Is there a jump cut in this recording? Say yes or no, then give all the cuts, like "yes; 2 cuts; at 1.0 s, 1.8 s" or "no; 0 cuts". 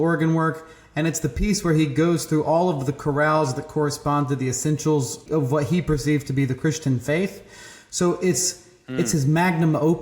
yes; 1 cut; at 5.2 s